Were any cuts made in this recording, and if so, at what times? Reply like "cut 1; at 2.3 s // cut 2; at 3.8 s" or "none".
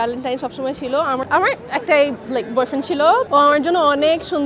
cut 1; at 1.2 s // cut 2; at 3.2 s